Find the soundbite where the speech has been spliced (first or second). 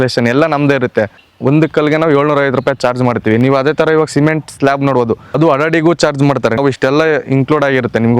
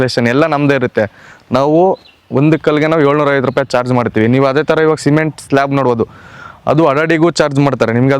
first